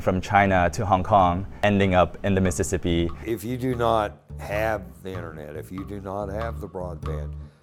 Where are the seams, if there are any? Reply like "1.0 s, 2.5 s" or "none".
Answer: 1.6 s, 3.2 s